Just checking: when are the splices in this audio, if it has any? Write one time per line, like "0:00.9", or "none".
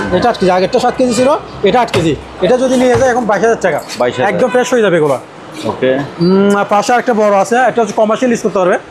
none